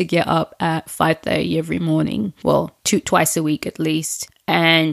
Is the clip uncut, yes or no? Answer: no